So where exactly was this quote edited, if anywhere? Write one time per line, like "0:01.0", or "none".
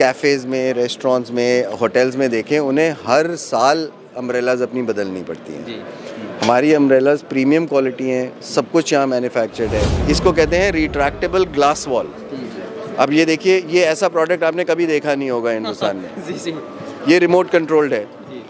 0:10.0